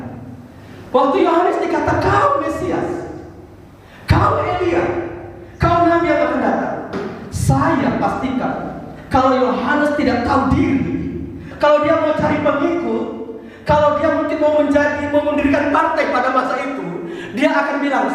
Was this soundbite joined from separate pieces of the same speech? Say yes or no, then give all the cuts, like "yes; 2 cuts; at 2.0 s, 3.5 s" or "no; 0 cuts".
no; 0 cuts